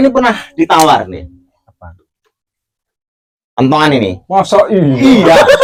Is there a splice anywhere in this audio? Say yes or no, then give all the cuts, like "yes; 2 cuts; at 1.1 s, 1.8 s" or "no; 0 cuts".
no; 0 cuts